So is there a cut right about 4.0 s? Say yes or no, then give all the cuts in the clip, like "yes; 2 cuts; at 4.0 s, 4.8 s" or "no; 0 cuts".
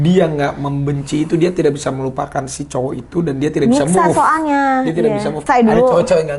no; 1 cut; at 5.4 s